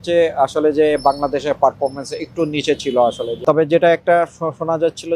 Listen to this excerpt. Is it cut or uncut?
cut